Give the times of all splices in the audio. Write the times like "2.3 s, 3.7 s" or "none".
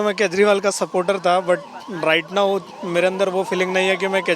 none